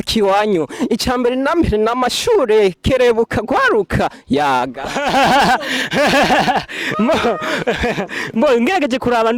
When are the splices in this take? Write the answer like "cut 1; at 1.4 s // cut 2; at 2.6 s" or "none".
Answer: none